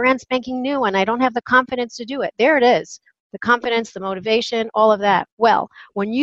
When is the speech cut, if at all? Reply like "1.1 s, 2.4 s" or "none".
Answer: 5.3 s